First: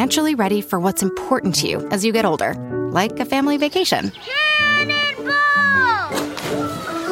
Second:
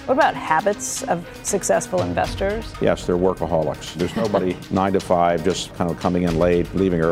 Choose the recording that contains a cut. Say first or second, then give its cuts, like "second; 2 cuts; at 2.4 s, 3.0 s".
second; 3 cuts; at 2.7 s, 4.2 s, 5.7 s